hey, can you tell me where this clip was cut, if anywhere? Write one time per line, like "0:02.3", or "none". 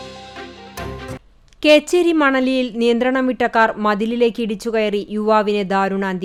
none